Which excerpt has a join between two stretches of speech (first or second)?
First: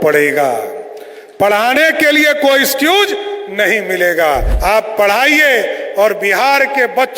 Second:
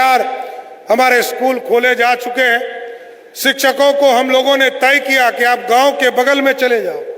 first